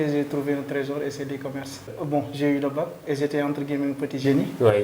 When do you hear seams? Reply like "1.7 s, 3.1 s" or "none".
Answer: 2.0 s